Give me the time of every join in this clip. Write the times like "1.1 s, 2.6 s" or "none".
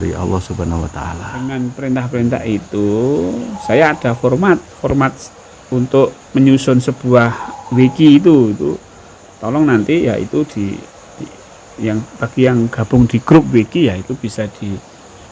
1.4 s